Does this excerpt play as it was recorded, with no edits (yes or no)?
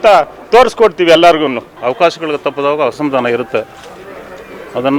no